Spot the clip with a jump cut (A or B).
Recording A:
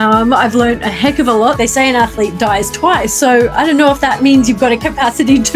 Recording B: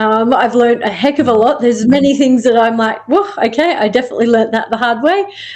A